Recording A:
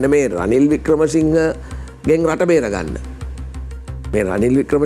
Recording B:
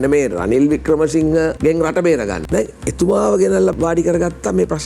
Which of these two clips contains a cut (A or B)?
B